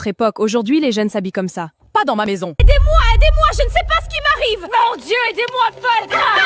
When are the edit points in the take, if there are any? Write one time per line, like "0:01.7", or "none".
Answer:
0:02.6